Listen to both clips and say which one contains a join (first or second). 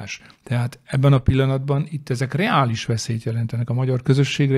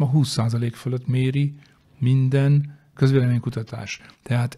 second